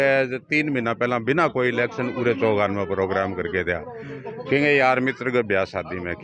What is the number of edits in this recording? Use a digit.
0